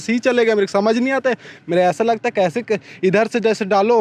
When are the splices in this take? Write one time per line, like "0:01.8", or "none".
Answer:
none